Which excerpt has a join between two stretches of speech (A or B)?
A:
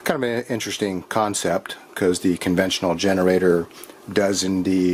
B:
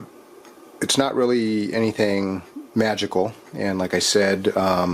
B